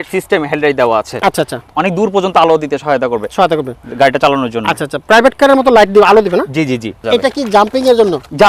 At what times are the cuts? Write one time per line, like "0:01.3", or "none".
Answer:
0:01.7
0:07.0